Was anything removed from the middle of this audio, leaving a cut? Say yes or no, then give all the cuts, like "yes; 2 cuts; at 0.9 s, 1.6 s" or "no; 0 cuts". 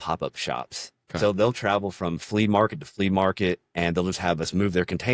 no; 0 cuts